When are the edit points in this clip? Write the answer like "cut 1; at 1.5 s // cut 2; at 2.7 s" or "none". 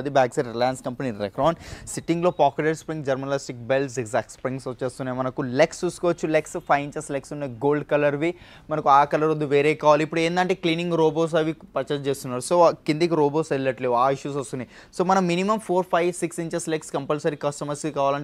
none